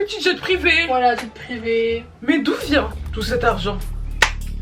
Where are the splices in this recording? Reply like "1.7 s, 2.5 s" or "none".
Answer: none

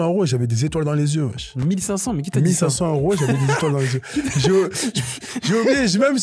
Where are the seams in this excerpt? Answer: none

